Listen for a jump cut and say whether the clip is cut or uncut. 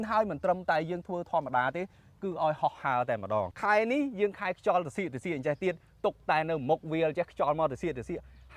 uncut